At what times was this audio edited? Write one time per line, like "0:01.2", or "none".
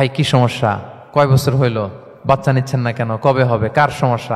0:00.9
0:02.1